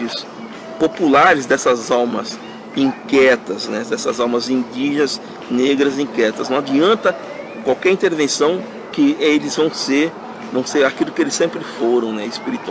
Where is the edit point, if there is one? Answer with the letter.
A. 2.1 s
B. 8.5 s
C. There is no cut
C